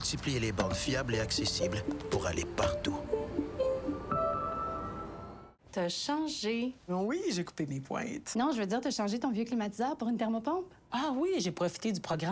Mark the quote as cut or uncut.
uncut